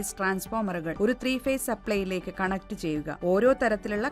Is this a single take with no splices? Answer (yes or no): no